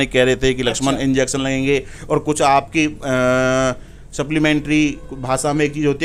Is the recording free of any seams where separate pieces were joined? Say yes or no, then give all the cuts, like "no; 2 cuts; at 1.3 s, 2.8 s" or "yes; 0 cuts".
yes; 0 cuts